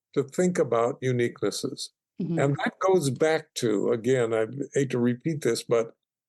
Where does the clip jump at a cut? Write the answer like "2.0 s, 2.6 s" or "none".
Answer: none